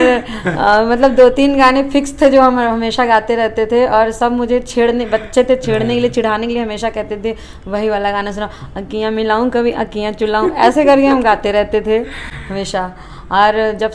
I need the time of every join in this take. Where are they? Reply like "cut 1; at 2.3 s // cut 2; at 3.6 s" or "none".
none

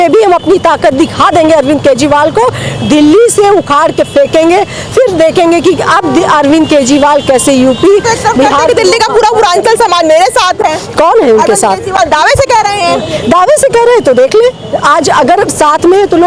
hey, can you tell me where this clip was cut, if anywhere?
none

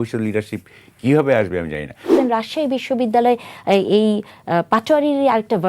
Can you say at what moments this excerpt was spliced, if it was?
cut 1; at 2.1 s

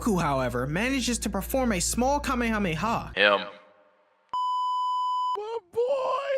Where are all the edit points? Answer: cut 1; at 3.1 s

